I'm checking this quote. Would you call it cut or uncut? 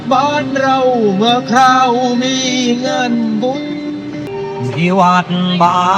cut